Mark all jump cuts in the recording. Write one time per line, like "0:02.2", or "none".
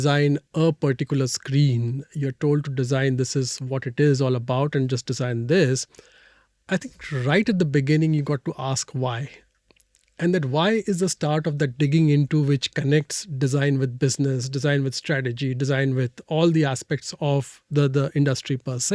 none